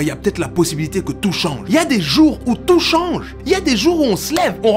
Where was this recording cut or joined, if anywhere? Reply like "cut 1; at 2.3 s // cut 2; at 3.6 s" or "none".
cut 1; at 1.6 s // cut 2; at 3.3 s